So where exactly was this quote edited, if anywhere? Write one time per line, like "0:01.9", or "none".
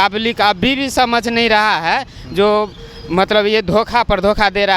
none